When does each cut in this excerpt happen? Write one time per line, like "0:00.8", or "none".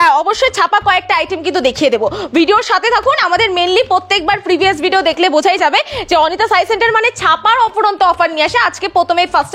none